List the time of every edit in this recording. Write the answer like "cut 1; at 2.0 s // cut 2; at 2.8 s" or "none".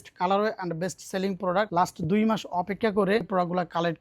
cut 1; at 1.7 s // cut 2; at 3.3 s